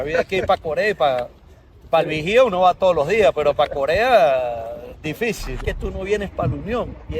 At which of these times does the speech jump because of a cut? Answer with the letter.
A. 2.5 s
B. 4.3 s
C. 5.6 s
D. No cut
C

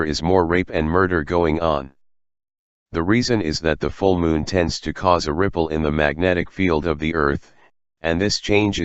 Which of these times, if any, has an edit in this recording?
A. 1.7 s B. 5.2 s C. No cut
A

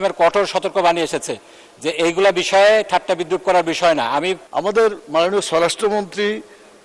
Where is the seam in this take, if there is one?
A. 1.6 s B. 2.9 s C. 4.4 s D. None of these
C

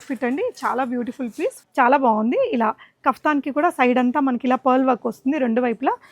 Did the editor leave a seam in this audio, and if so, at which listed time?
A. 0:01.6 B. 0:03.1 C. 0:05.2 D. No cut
A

